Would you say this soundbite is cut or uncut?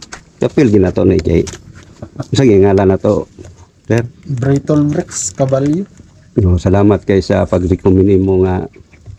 uncut